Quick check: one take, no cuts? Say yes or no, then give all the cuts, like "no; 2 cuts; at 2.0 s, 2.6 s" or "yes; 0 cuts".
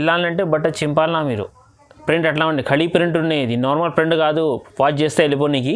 yes; 0 cuts